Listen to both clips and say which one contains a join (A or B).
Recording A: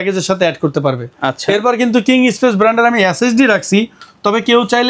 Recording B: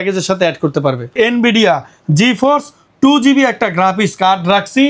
B